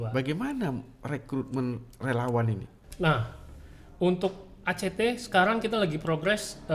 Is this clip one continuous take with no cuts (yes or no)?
no